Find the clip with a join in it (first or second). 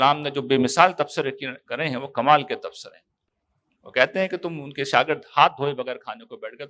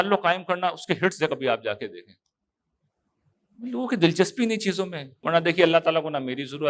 second